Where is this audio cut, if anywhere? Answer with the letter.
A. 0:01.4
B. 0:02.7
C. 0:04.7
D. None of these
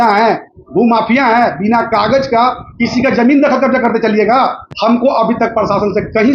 C